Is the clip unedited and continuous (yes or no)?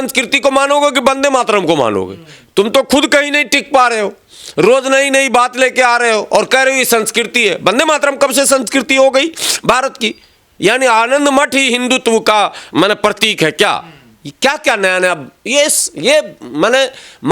yes